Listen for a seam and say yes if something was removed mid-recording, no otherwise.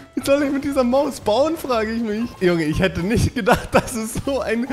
yes